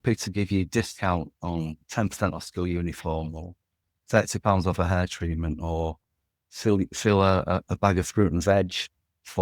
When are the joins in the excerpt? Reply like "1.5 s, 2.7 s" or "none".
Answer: none